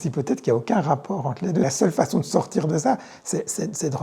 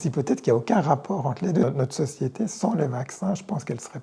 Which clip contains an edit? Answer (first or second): second